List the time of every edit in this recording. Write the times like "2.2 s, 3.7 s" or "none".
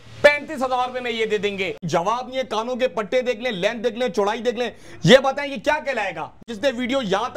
1.8 s, 6.4 s

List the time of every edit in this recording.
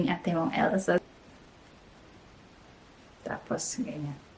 1.0 s

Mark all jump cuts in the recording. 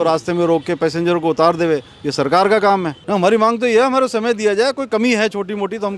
2.9 s

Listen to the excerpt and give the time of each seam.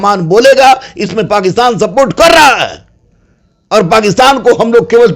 none

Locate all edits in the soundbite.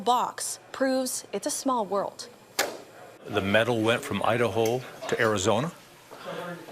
none

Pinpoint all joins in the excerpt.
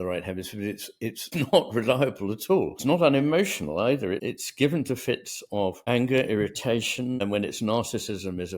1.2 s, 2.8 s, 4.2 s, 5.8 s, 7.2 s

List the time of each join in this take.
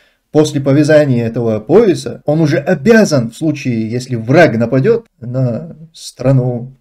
5.2 s

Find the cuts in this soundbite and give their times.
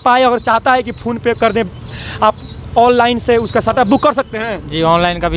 none

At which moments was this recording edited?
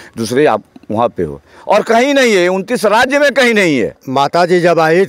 3.9 s

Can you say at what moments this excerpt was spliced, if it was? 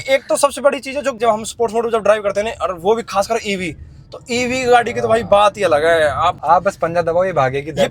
1.2 s, 6.4 s

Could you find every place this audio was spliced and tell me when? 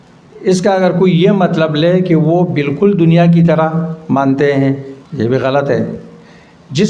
5.0 s

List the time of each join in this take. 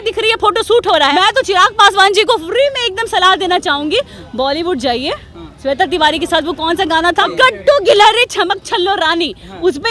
1.1 s, 7.3 s

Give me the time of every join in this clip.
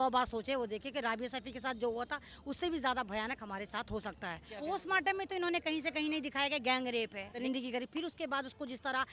4.5 s, 7.3 s

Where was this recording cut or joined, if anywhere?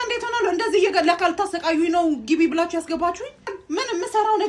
3.5 s

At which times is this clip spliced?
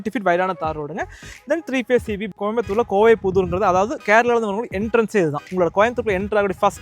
2.2 s, 5.4 s

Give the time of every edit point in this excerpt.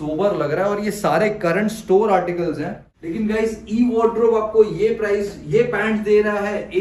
2.9 s

